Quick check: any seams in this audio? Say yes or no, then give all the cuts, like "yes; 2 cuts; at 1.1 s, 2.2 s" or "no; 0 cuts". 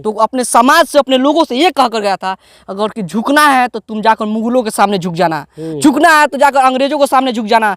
no; 0 cuts